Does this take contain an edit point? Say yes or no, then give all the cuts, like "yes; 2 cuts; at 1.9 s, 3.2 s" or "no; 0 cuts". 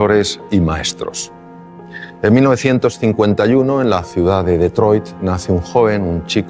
no; 0 cuts